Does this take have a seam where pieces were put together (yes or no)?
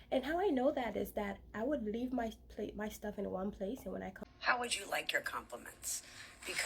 yes